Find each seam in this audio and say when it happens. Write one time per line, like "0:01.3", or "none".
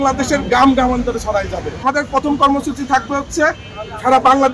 0:01.8